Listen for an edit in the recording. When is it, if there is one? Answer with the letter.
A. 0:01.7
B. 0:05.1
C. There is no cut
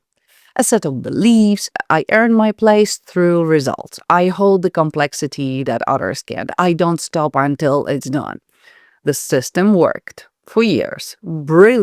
A